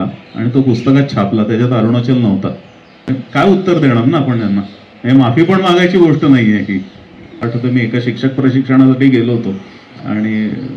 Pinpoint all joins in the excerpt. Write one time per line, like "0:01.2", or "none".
0:02.9
0:07.4